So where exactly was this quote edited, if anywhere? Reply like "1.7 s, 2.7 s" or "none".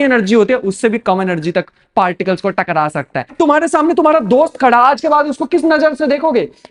3.3 s